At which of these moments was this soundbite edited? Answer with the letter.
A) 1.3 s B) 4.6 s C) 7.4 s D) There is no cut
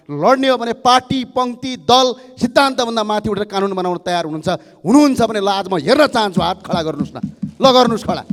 D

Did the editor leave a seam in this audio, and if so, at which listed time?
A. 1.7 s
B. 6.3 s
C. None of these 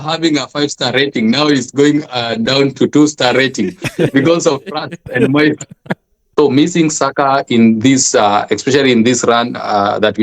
B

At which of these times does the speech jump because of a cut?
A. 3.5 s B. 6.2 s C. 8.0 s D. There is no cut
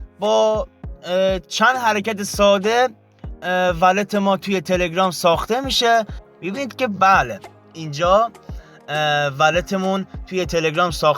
B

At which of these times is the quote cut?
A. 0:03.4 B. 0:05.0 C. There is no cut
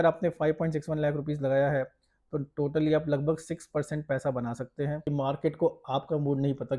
B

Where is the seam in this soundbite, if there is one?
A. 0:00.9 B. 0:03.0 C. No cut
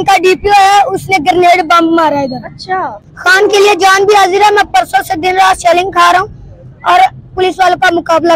B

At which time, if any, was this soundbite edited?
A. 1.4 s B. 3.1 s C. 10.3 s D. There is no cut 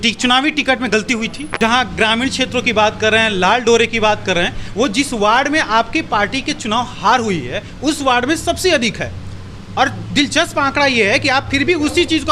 A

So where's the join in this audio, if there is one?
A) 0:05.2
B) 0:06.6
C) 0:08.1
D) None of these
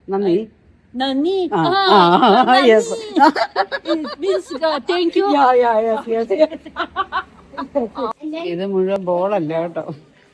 C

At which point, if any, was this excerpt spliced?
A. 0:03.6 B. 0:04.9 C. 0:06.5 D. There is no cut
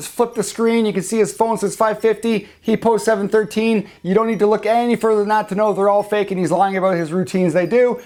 D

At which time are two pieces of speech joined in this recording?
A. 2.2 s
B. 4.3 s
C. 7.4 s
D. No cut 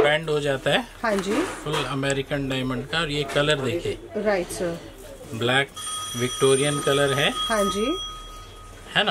D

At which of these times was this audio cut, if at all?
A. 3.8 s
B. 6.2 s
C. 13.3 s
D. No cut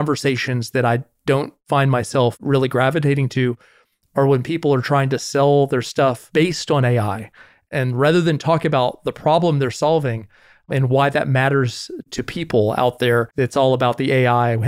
C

